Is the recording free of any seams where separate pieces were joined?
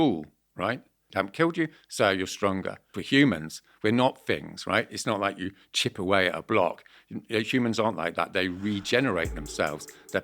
no; 2 cuts; at 1.1 s, 2.9 s

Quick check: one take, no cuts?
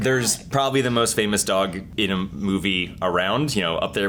yes; 0 cuts

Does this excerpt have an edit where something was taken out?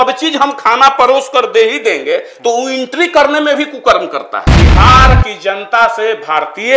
yes; 1 cut; at 4.4 s

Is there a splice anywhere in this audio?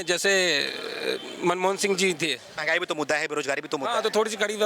yes; 1 cut; at 2.5 s

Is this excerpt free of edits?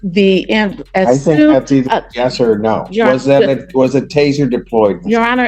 yes; 0 cuts

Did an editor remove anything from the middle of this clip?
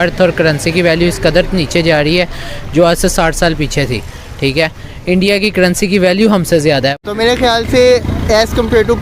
yes; 1 cut; at 6.9 s

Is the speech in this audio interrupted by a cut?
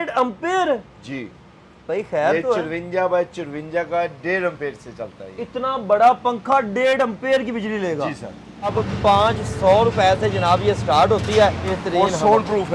yes; 2 cuts; at 8.7 s, 11.7 s

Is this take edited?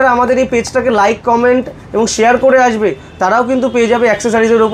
no; 0 cuts

